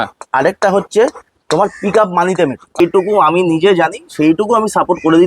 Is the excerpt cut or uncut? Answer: cut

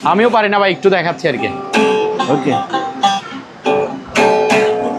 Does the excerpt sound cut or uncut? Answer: uncut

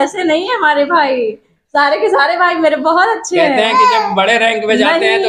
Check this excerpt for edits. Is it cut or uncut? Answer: uncut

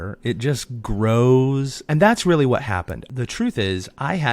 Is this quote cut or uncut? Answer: cut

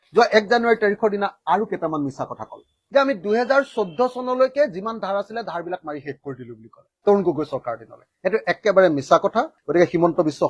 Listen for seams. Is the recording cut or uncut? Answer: cut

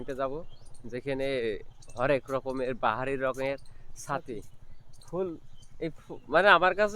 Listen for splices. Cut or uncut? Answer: uncut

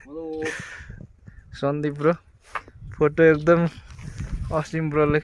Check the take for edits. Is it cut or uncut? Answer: uncut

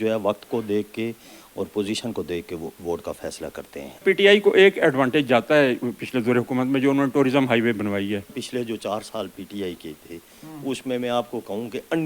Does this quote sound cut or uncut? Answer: cut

